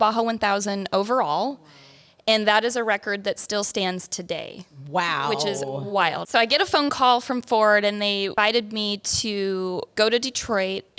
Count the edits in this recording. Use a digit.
3